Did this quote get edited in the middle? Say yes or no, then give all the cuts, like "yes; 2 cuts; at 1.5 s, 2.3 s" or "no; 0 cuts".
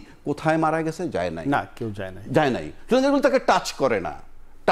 no; 0 cuts